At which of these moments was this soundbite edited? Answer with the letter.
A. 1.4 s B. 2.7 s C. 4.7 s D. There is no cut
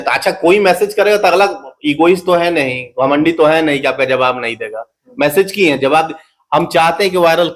D